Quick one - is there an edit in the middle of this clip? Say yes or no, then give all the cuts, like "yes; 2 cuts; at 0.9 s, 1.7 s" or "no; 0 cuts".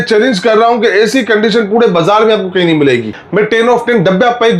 yes; 1 cut; at 3.2 s